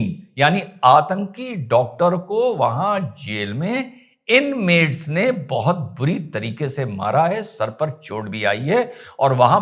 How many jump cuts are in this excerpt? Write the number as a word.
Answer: zero